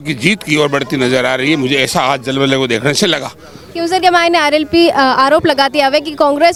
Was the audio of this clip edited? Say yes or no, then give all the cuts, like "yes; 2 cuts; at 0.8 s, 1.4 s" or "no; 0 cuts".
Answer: no; 0 cuts